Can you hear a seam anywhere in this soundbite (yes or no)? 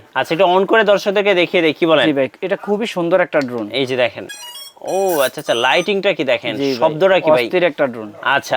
no